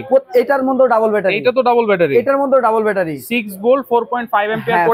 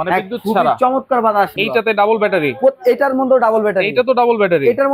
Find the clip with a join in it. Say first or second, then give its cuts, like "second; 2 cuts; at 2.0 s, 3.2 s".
second; 1 cut; at 1.6 s